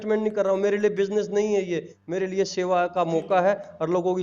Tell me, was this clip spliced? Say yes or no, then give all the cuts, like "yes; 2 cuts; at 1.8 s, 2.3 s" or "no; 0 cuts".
no; 0 cuts